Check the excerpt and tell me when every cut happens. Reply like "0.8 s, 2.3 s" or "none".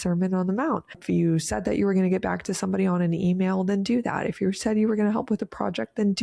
1.0 s